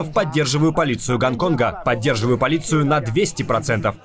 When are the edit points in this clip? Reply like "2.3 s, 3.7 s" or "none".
none